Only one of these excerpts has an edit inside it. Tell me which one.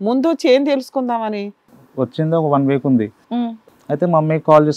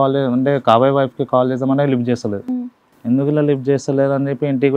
first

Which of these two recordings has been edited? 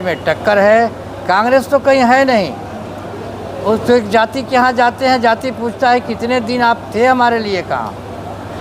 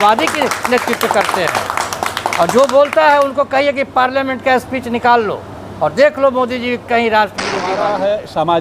second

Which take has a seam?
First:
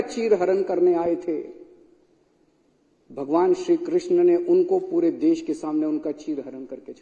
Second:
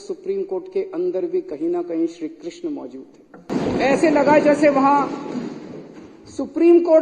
second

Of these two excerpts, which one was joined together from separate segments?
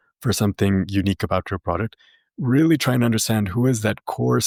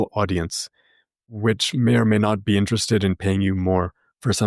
second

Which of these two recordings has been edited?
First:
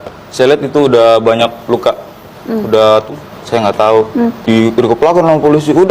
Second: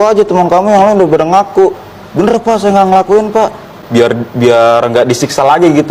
first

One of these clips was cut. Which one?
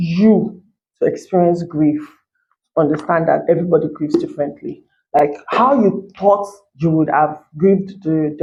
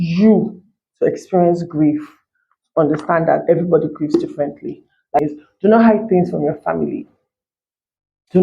second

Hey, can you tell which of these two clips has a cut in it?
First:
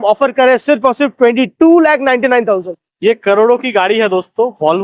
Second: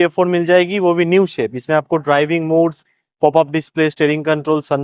first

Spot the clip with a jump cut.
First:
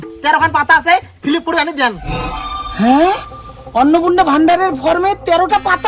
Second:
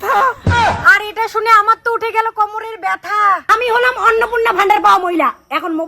second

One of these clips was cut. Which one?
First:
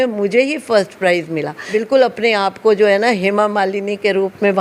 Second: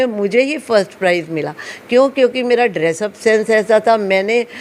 first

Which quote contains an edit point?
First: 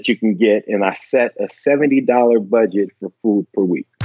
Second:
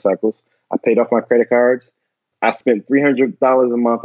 second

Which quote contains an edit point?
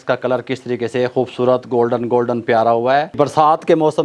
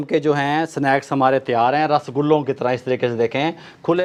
first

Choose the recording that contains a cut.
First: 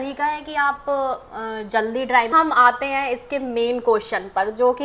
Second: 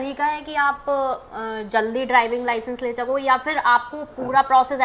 first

